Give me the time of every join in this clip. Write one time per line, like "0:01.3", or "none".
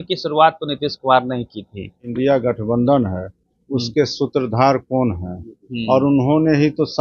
0:02.1